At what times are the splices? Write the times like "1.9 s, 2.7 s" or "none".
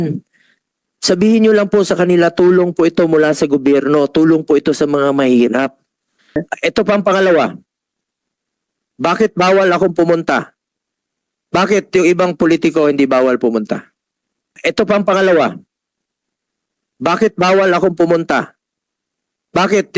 6.4 s, 14.5 s